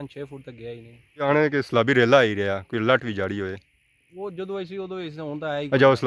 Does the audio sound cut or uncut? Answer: cut